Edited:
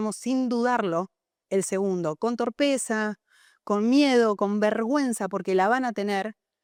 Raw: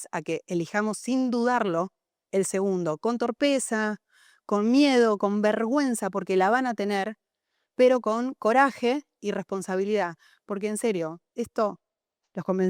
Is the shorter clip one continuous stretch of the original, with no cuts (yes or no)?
yes